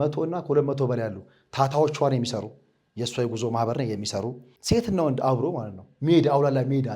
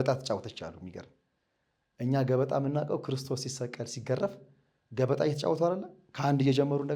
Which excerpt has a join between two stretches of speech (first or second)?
first